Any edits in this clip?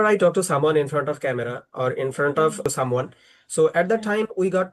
yes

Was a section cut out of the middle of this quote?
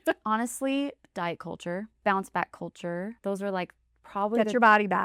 yes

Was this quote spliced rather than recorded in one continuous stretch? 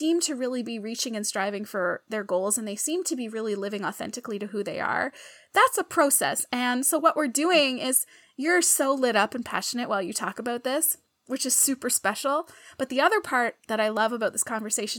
no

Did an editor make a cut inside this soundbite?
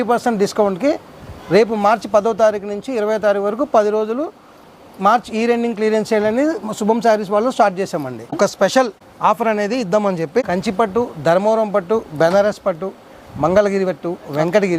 yes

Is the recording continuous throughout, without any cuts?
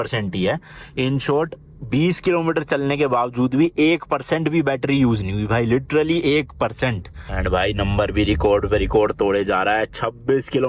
no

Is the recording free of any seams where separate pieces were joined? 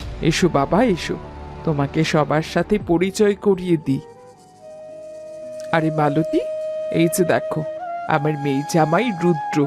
yes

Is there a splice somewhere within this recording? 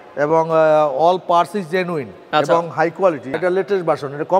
yes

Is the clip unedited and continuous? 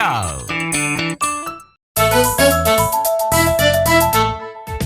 no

